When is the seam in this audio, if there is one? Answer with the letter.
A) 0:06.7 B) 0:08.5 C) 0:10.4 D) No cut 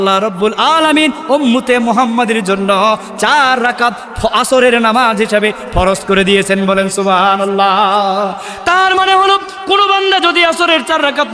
D